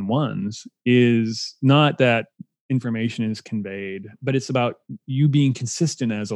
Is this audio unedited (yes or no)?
no